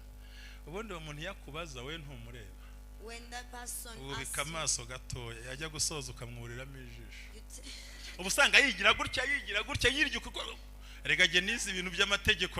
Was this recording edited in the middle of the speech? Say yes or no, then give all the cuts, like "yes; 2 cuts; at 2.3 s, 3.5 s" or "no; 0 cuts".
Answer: no; 0 cuts